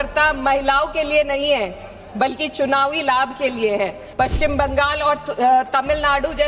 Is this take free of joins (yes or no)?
no